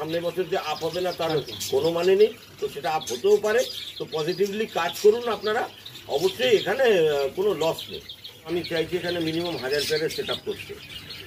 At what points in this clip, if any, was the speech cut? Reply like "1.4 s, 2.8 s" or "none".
8.5 s